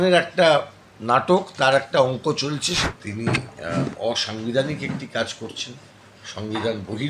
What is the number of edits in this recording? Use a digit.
1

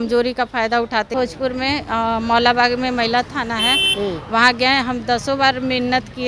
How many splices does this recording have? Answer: 1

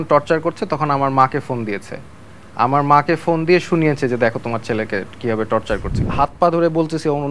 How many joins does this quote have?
1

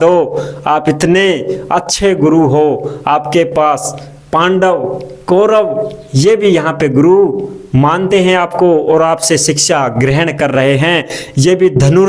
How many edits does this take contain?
0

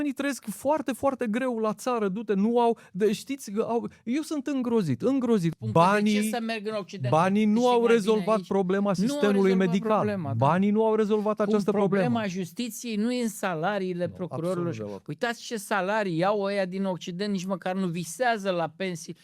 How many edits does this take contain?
1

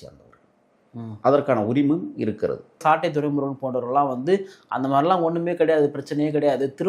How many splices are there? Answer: 1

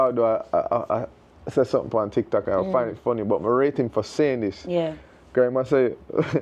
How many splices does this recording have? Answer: 0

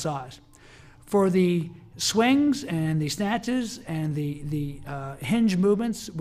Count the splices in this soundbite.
1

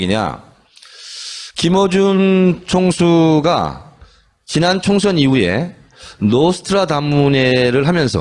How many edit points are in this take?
0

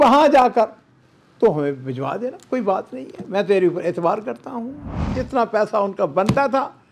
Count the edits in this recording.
1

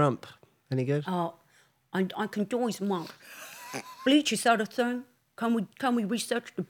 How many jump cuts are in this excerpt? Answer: 0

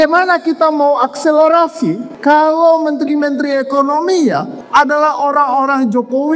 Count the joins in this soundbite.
2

